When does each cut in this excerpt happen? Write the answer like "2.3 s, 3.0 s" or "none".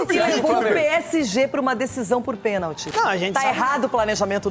2.9 s